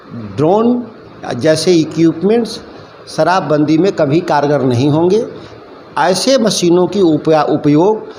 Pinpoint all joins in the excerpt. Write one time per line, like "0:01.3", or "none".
none